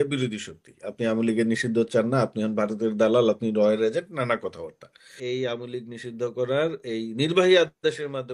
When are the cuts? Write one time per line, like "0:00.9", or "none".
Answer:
0:05.1